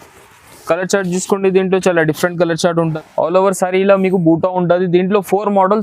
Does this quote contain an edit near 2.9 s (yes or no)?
yes